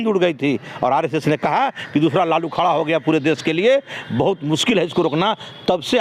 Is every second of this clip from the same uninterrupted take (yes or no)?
yes